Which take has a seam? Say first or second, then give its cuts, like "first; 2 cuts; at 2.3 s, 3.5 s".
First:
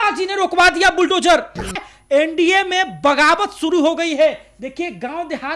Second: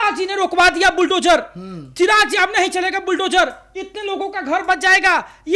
first; 1 cut; at 1.8 s